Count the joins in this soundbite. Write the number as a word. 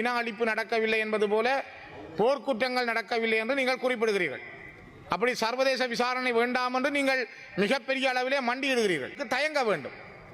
one